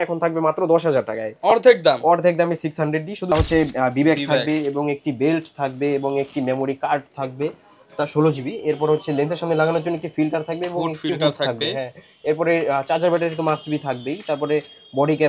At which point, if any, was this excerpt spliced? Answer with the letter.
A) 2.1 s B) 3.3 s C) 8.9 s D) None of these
B